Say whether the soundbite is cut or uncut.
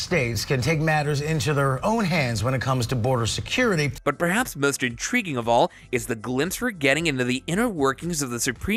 uncut